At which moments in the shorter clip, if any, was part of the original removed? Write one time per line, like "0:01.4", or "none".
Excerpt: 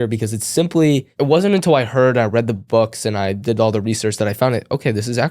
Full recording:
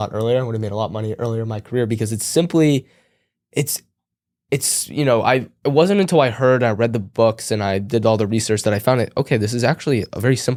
0:01.1